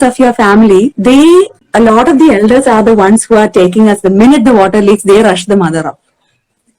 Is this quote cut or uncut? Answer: cut